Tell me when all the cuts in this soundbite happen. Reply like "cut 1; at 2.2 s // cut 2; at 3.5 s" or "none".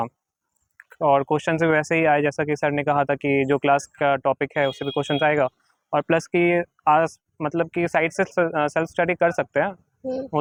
none

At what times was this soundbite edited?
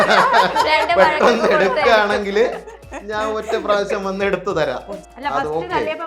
cut 1; at 5.0 s

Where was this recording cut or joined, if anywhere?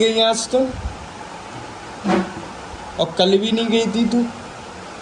none

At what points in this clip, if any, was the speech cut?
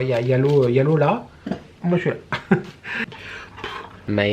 cut 1; at 3.4 s

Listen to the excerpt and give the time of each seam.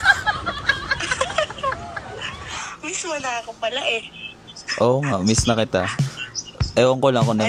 none

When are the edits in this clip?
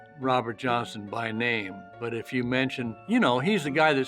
cut 1; at 1.8 s

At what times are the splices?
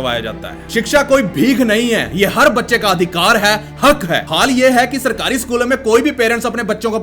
none

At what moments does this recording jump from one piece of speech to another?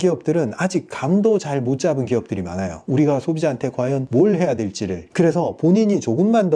cut 1; at 2.8 s // cut 2; at 4.0 s // cut 3; at 5.0 s

